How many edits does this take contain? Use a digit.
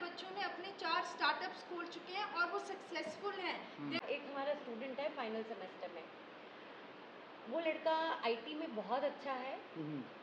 1